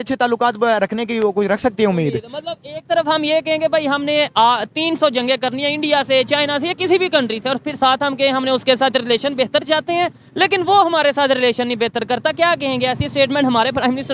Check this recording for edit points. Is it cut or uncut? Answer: uncut